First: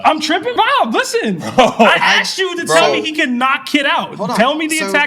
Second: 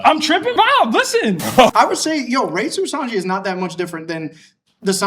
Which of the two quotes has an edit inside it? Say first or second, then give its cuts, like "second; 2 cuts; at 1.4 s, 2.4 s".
second; 1 cut; at 1.7 s